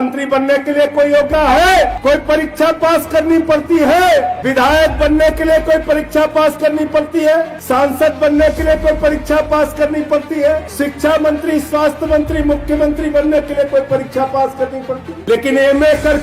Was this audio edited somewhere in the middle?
yes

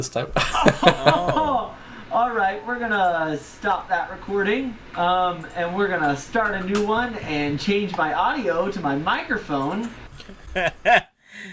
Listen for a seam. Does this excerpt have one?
yes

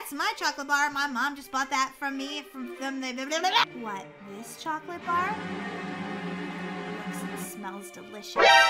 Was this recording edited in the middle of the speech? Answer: yes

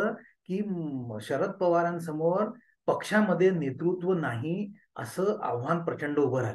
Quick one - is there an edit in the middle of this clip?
no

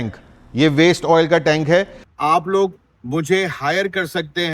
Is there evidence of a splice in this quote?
yes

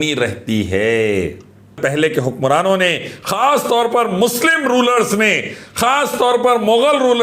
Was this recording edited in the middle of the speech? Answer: yes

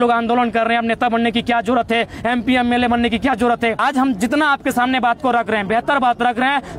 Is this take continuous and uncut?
no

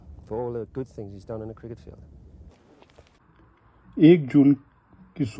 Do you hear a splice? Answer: yes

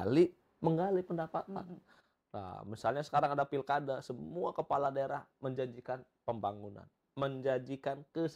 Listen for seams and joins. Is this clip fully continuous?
yes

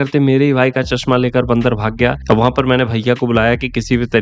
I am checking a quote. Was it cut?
no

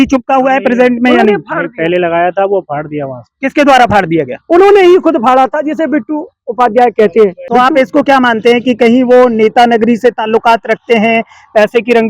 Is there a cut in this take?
yes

